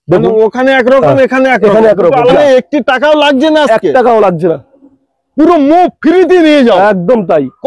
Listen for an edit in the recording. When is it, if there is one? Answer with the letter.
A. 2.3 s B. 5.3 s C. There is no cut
A